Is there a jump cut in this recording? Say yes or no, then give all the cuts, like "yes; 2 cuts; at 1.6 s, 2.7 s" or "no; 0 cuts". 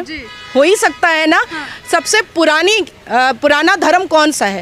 no; 0 cuts